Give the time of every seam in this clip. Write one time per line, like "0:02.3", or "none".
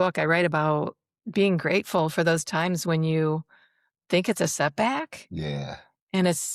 none